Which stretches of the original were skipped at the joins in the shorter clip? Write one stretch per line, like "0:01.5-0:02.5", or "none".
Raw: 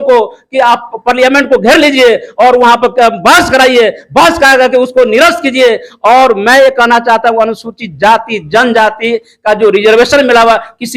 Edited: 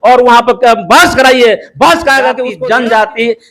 0:04.8-0:08.3